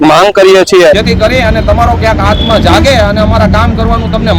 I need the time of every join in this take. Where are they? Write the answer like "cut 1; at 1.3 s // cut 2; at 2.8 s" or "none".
cut 1; at 1.0 s